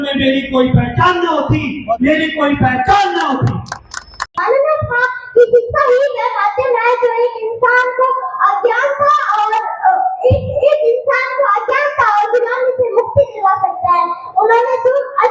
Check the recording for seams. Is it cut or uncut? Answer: uncut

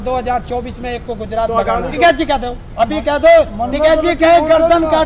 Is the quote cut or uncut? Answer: cut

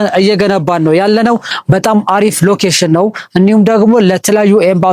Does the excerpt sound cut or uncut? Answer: cut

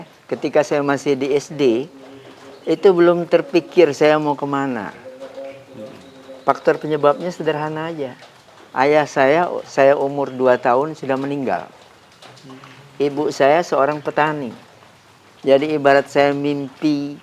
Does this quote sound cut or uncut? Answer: uncut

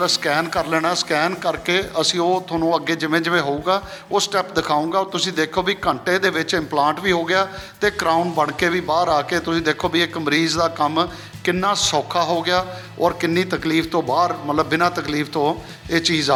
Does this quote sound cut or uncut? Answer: uncut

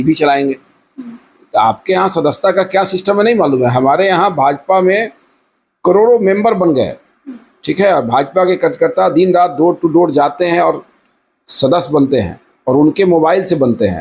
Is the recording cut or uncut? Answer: uncut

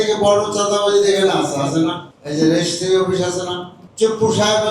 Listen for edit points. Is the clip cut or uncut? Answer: cut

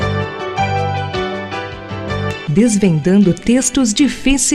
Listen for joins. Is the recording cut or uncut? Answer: uncut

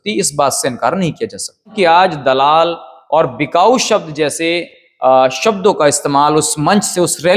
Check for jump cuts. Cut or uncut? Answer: cut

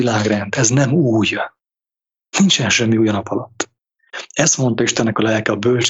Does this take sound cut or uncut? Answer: uncut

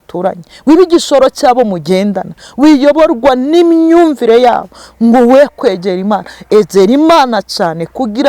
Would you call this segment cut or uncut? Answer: uncut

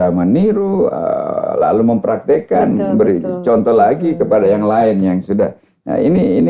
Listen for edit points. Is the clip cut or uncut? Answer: uncut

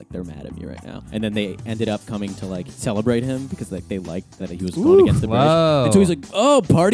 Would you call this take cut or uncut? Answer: cut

